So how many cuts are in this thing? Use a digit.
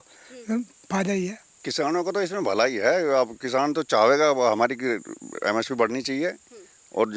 1